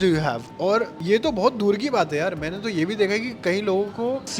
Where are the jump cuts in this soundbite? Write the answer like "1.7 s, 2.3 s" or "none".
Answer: none